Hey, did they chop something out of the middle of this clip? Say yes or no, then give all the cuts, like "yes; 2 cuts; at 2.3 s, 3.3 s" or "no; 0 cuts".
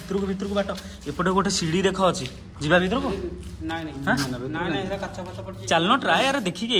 no; 0 cuts